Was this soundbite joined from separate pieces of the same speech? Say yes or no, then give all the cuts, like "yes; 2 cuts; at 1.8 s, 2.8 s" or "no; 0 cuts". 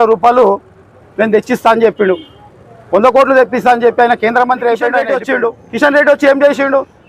yes; 1 cut; at 5.2 s